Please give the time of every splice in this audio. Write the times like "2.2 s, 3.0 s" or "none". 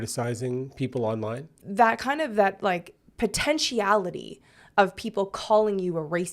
1.5 s